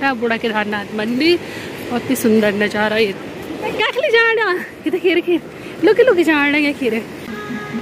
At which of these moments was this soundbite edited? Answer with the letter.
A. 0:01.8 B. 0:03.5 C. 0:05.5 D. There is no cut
D